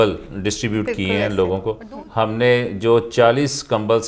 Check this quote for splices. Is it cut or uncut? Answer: cut